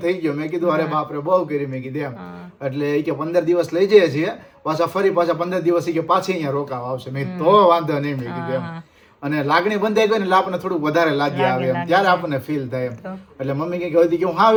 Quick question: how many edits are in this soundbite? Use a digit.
0